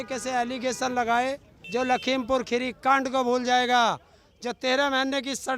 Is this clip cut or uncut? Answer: cut